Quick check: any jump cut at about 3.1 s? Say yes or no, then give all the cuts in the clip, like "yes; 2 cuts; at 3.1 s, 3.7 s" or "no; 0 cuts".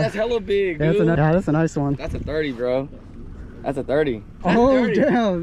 no; 2 cuts; at 1.1 s, 4.4 s